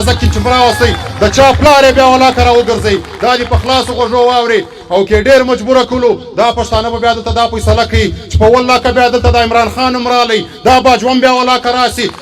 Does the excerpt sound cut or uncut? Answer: uncut